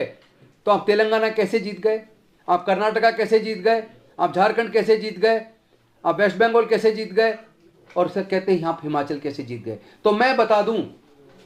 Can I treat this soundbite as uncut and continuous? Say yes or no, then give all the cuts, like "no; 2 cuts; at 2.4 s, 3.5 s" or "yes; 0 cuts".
yes; 0 cuts